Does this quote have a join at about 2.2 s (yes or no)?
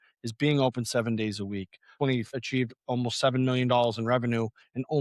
yes